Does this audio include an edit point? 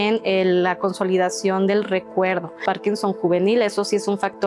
yes; 1 cut; at 2.6 s

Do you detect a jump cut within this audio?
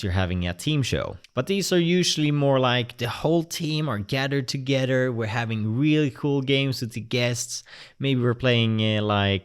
yes; 1 cut; at 1.2 s

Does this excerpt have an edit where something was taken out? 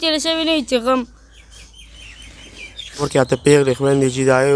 yes; 1 cut; at 3.1 s

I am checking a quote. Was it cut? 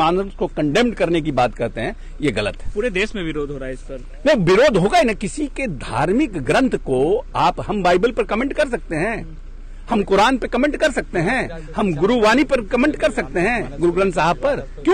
no; 0 cuts

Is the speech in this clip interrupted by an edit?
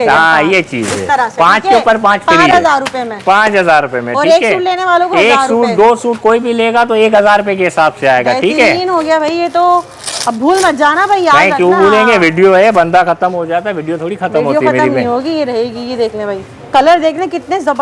no; 0 cuts

